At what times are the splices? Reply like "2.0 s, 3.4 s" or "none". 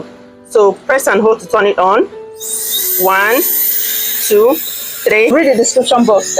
5.3 s

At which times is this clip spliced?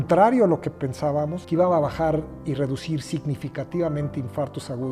1.3 s

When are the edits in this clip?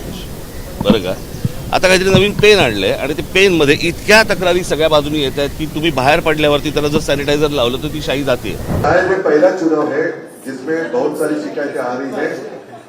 8.6 s

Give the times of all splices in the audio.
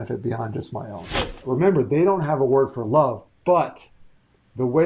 1.4 s

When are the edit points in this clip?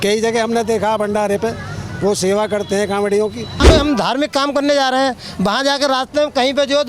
3.6 s

